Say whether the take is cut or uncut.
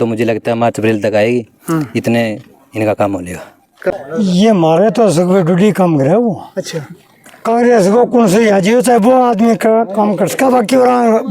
cut